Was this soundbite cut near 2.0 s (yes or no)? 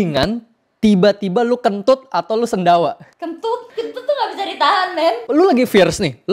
no